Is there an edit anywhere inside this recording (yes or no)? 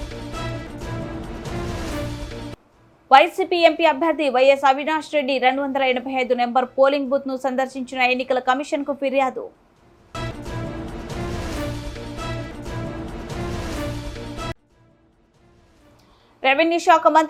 no